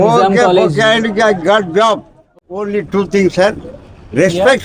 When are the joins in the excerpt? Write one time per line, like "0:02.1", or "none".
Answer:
0:02.3